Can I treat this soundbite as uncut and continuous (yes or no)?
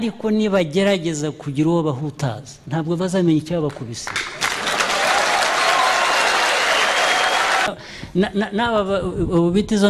no